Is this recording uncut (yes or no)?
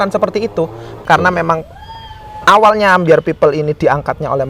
no